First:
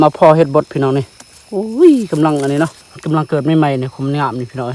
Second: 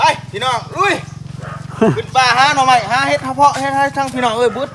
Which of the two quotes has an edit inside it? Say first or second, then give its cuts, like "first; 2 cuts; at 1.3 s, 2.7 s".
first; 1 cut; at 2.9 s